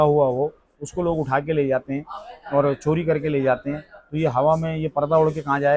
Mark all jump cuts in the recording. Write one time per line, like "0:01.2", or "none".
none

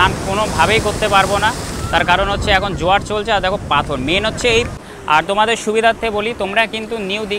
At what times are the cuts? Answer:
0:04.7

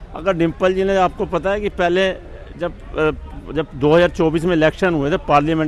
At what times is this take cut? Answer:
none

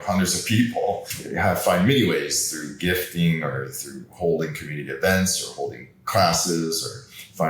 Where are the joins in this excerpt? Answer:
0:01.2

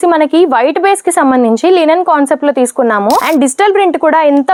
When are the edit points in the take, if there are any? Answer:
none

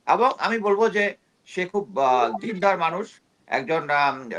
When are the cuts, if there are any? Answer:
none

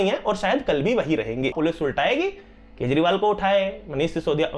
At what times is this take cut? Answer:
0:01.5

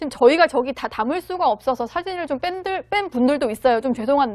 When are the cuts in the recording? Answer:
none

